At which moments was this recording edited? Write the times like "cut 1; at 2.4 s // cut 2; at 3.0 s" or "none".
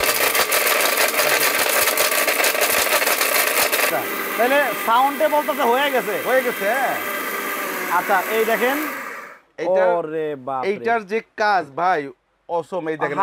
cut 1; at 3.9 s